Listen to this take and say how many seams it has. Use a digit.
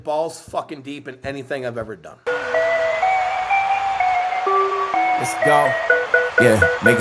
1